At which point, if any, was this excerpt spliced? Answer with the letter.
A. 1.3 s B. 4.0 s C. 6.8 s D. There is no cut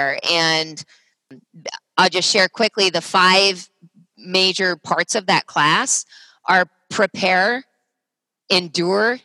A